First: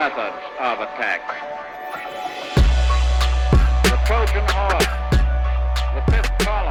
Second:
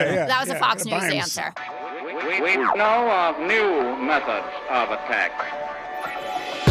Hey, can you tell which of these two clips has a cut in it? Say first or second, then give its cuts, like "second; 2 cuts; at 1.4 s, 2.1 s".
second; 1 cut; at 1.4 s